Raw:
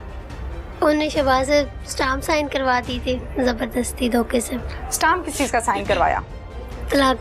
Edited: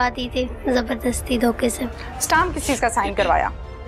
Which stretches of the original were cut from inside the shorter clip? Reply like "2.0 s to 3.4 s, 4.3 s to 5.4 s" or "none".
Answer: none